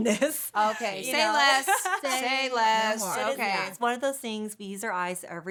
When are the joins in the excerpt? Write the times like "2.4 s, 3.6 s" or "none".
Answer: none